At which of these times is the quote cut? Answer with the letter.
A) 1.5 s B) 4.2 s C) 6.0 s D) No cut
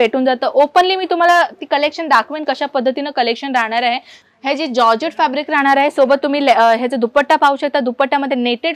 B